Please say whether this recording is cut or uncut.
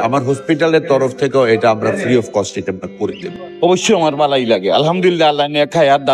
cut